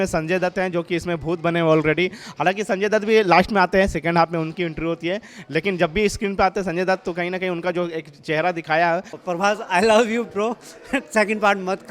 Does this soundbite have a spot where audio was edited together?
yes; 1 cut; at 9.1 s

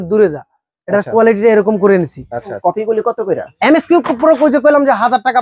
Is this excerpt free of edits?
no; 1 cut; at 2.4 s

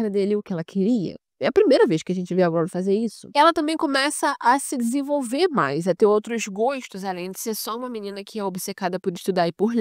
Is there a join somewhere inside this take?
no; 0 cuts

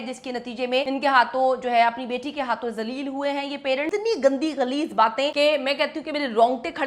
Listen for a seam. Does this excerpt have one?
yes; 3 cuts; at 0.9 s, 3.9 s, 5.3 s

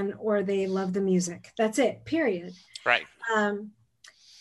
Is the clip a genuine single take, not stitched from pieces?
yes; 0 cuts

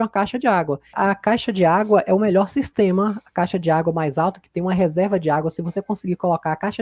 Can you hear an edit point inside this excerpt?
yes; 1 cut; at 0.9 s

